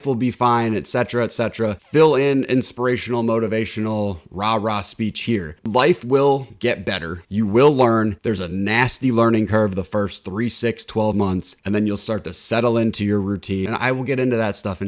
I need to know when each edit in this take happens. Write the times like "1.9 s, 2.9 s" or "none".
5.6 s, 13.7 s